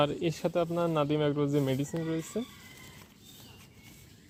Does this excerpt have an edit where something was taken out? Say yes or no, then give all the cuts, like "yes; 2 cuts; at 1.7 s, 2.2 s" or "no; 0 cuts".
no; 0 cuts